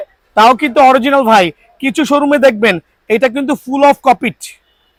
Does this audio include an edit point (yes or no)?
no